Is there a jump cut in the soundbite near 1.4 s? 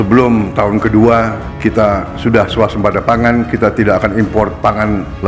yes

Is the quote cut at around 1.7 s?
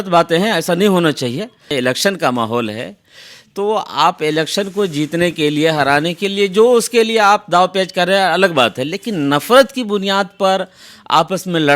yes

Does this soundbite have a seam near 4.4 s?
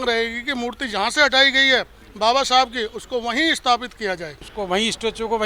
yes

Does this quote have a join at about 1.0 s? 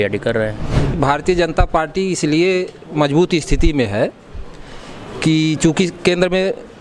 yes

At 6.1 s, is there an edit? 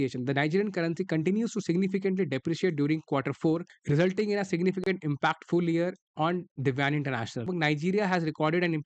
no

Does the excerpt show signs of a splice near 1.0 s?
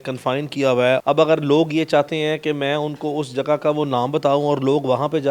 yes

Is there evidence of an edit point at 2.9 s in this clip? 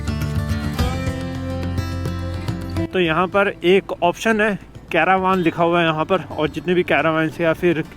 yes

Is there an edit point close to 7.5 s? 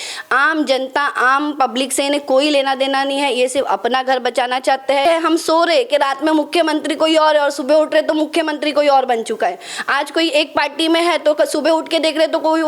no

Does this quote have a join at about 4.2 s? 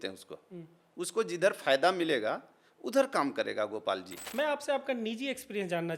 yes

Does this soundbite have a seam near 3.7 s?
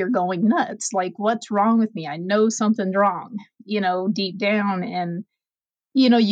no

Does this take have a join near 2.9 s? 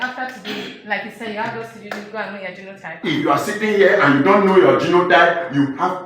yes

